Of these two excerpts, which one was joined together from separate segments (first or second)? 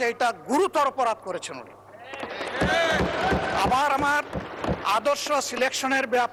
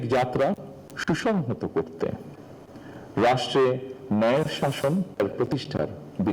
second